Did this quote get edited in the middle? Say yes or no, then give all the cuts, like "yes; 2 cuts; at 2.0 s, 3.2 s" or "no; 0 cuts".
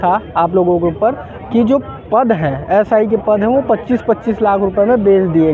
no; 0 cuts